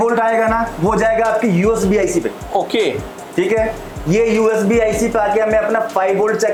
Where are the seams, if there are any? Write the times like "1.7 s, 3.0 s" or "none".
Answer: none